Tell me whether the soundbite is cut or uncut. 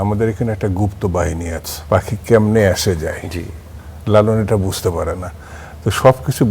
cut